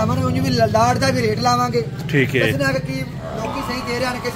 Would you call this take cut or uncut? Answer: uncut